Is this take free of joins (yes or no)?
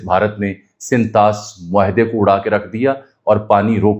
yes